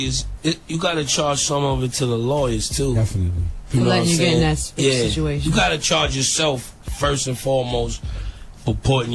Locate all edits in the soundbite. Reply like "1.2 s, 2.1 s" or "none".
4.1 s